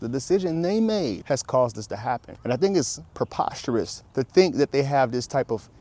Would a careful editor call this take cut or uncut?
cut